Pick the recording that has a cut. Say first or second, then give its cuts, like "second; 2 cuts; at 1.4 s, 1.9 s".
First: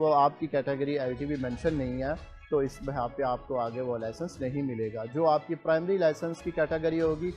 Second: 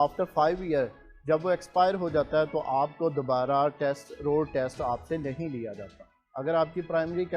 second; 1 cut; at 6.3 s